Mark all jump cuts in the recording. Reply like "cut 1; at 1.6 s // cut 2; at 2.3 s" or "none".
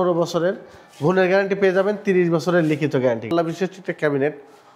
cut 1; at 3.3 s

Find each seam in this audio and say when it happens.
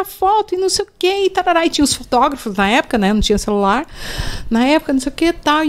none

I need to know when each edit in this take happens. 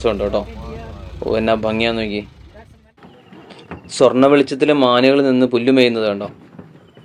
none

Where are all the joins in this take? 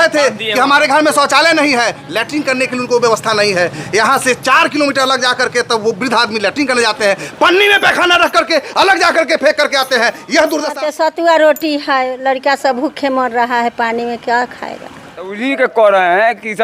cut 1; at 10.7 s // cut 2; at 15.3 s

